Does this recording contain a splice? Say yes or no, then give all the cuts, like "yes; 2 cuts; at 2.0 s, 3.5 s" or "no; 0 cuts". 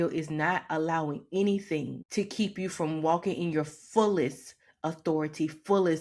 yes; 1 cut; at 2.0 s